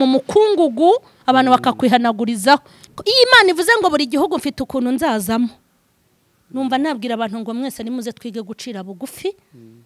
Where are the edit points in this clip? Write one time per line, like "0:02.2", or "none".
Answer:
0:02.8